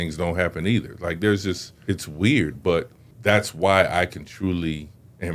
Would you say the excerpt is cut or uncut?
cut